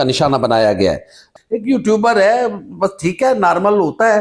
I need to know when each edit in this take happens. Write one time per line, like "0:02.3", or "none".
0:01.2